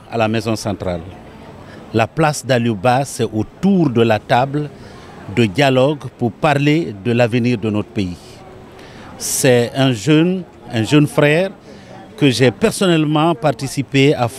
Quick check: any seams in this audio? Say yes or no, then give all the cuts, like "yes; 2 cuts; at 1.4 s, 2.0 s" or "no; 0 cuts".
no; 0 cuts